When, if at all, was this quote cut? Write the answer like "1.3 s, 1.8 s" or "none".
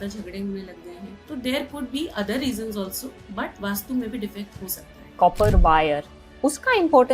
1.1 s, 3.5 s, 5.1 s